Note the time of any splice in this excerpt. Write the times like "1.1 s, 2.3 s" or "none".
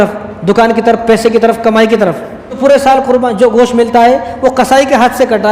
2.6 s